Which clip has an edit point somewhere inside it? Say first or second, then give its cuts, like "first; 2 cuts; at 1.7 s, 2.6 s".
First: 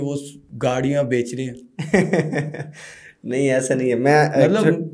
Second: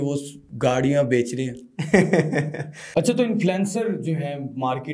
second; 1 cut; at 2.8 s